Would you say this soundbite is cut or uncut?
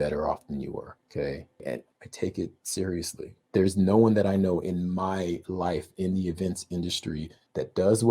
cut